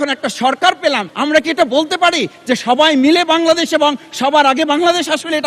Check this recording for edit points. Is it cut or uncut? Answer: cut